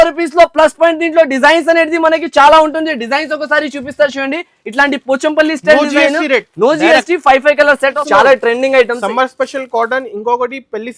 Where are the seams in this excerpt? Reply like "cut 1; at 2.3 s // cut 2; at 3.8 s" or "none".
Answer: cut 1; at 8.0 s